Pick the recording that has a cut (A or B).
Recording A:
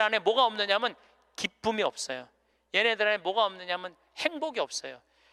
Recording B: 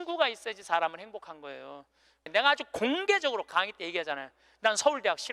B